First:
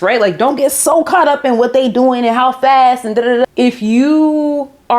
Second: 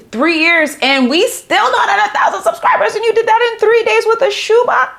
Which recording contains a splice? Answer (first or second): first